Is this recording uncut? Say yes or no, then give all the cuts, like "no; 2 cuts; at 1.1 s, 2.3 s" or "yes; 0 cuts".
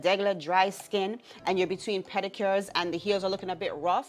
yes; 0 cuts